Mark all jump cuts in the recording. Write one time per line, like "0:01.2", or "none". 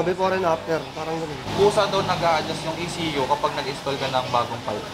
0:01.4